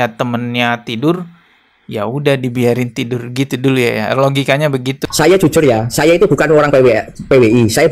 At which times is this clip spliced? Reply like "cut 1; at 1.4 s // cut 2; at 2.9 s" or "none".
cut 1; at 5.0 s

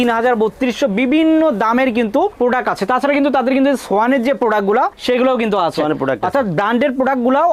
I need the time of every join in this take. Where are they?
none

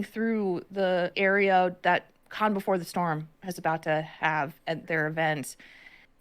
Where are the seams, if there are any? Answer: cut 1; at 1.1 s // cut 2; at 4.8 s

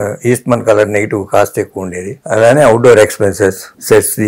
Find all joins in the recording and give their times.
none

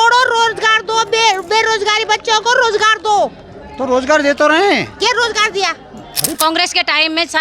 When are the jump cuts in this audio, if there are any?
cut 1; at 6.4 s

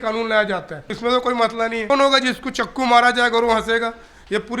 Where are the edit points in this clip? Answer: cut 1; at 0.9 s // cut 2; at 1.9 s

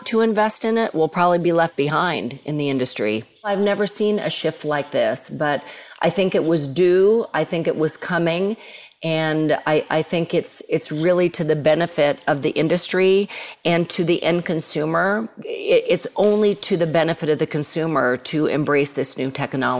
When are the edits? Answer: cut 1; at 3.5 s // cut 2; at 15.3 s

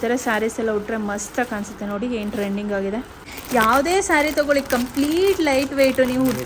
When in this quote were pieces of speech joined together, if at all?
cut 1; at 3.3 s

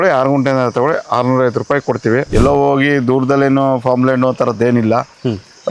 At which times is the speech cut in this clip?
cut 1; at 2.3 s

